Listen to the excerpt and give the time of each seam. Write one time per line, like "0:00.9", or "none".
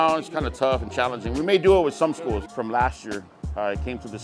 0:02.5